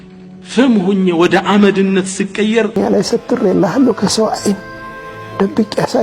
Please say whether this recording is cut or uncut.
cut